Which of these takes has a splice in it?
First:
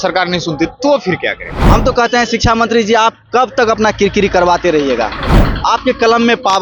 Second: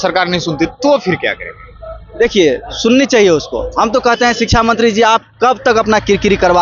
first; 1 cut; at 1.6 s

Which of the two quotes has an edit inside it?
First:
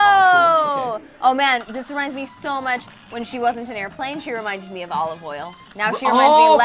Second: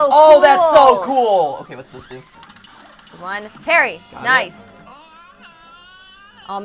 second; 1 cut; at 2.2 s

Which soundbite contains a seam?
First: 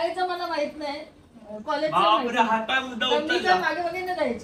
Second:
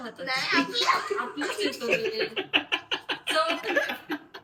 second; 1 cut; at 1.5 s

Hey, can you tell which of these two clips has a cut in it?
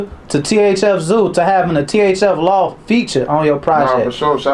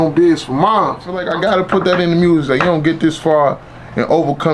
second; 1 cut; at 1.2 s

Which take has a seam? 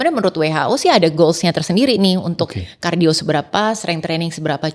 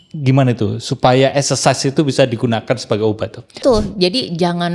second; 1 cut; at 3.6 s

